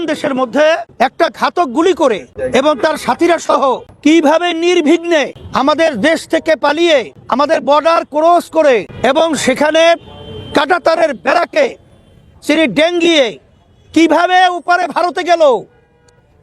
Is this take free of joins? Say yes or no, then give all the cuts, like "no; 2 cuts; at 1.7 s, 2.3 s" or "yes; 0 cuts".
no; 6 cuts; at 0.9 s, 2.3 s, 3.9 s, 5.4 s, 7.2 s, 8.9 s